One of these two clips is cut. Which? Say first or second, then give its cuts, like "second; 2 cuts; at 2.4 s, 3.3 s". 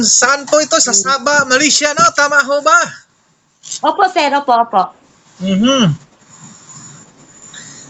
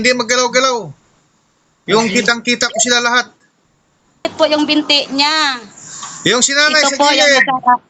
second; 1 cut; at 4.2 s